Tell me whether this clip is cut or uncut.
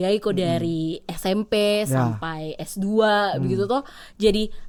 uncut